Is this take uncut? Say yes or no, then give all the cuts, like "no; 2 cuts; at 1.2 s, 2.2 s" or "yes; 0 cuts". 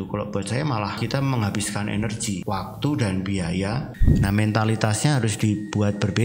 no; 3 cuts; at 1.0 s, 2.4 s, 4.0 s